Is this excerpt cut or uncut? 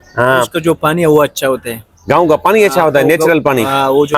uncut